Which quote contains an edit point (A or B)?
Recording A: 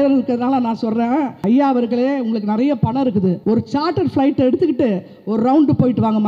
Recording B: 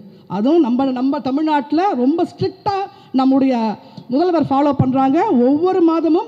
A